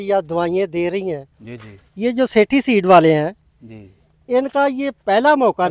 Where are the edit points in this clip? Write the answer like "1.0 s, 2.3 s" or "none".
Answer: none